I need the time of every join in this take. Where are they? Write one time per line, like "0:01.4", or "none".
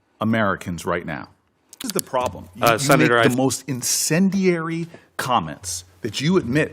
0:03.2